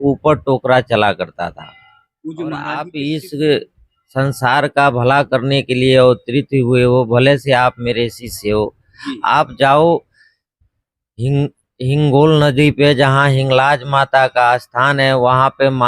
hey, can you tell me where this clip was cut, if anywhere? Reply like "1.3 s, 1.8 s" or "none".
2.9 s